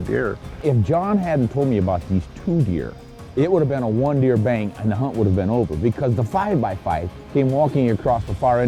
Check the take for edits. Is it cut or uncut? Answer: uncut